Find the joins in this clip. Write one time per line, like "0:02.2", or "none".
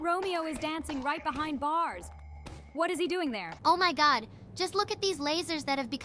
0:03.5